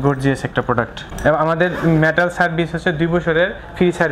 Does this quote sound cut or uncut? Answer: cut